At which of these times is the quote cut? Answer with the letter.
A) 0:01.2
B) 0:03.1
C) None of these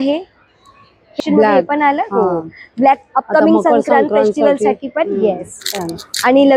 A